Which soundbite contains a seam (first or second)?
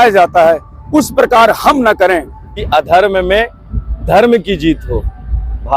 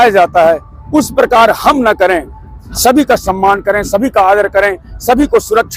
first